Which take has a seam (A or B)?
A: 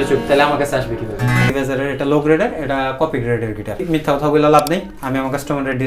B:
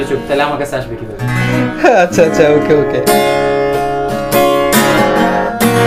A